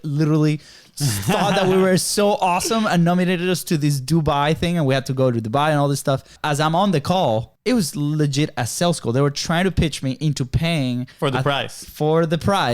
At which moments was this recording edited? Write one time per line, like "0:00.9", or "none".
0:06.3
0:07.5